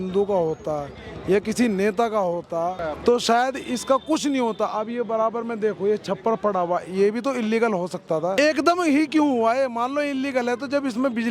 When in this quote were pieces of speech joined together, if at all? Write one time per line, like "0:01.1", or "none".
0:02.9
0:08.3